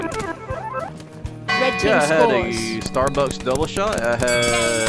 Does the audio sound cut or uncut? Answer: cut